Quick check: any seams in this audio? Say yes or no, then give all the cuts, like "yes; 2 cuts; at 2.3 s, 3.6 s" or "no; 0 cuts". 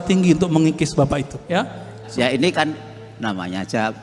yes; 1 cut; at 1.7 s